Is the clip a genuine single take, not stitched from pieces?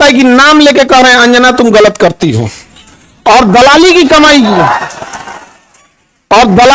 yes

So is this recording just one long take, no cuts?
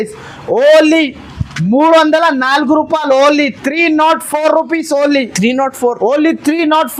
yes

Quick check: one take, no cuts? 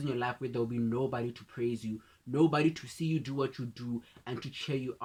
yes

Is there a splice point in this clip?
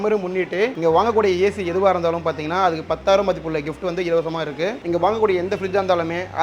yes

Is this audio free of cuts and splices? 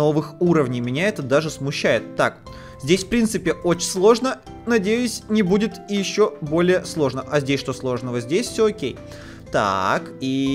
yes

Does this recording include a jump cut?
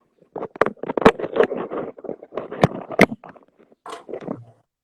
yes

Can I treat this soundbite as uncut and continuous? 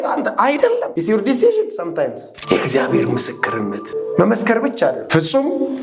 no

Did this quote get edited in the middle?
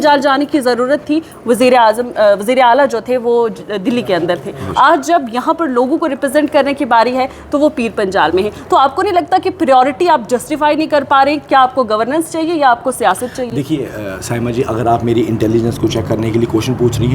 no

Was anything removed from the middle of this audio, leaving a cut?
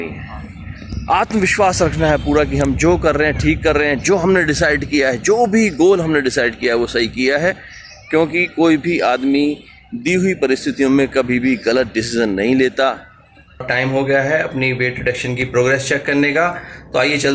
yes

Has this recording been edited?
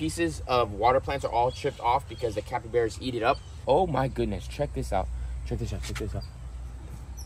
yes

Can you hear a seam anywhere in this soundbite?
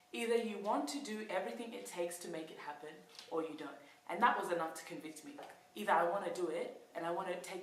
yes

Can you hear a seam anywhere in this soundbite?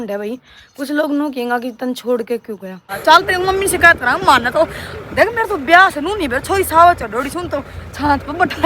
yes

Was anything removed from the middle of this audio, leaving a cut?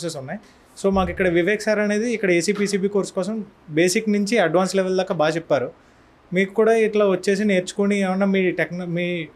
no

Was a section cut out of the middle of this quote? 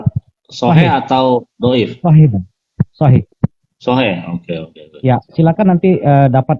yes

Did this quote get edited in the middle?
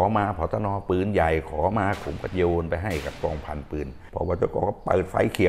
yes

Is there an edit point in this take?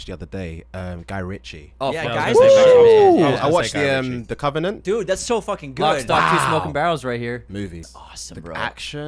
yes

